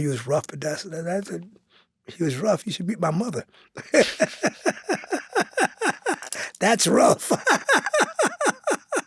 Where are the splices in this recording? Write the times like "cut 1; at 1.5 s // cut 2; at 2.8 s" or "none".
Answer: none